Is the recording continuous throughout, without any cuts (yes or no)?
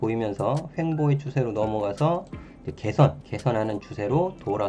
no